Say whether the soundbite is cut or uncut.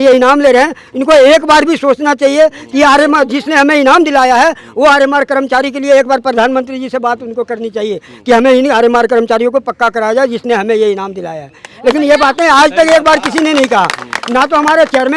uncut